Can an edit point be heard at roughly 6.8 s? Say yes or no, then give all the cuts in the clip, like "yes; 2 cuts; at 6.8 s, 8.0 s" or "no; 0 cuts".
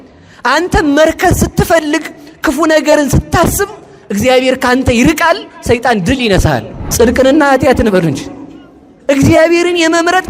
yes; 1 cut; at 6.8 s